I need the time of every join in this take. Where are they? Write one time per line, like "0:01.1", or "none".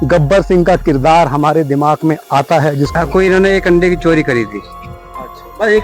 0:02.9